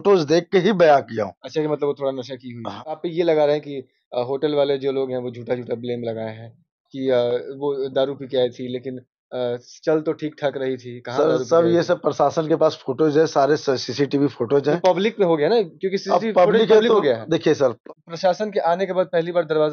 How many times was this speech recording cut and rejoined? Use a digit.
2